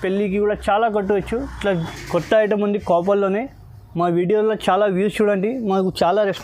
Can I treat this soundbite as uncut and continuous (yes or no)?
no